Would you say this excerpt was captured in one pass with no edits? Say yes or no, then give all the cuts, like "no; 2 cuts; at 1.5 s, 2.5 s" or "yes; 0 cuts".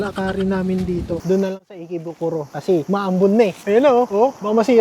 no; 1 cut; at 1.2 s